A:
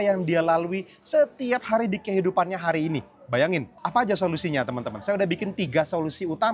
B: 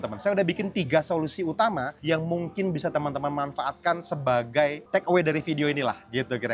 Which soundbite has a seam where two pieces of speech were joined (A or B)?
A